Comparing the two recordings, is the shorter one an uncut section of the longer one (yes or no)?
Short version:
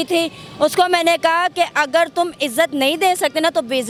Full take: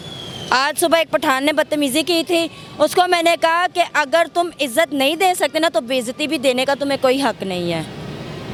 yes